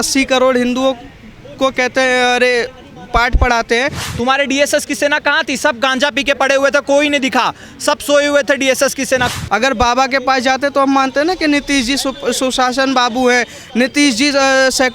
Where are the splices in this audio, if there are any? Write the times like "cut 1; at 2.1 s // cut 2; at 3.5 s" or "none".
cut 1; at 4.0 s // cut 2; at 9.3 s